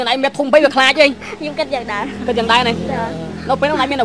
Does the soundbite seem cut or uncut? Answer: uncut